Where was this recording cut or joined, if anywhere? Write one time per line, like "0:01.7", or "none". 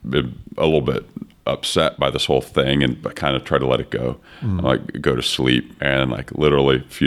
0:05.7